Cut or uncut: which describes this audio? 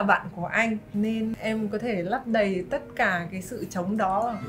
cut